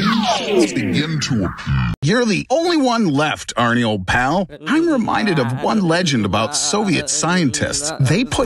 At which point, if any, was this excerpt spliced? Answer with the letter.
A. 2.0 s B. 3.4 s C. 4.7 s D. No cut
A